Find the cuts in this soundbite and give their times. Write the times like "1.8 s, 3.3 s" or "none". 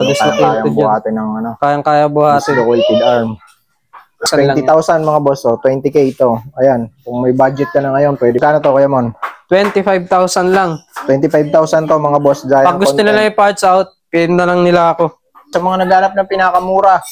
4.2 s, 8.4 s, 15.5 s